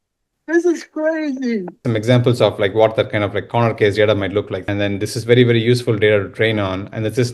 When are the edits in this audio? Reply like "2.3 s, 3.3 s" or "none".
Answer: 1.8 s, 4.6 s